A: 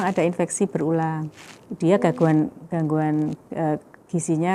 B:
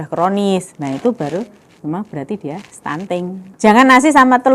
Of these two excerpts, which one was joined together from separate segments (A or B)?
B